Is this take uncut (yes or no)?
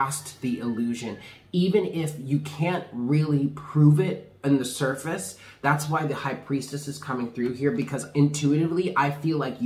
yes